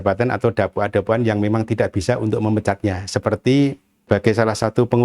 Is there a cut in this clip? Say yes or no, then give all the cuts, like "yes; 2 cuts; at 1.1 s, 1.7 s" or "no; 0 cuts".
yes; 1 cut; at 3.9 s